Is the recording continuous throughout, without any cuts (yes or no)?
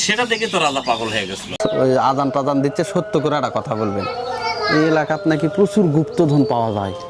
no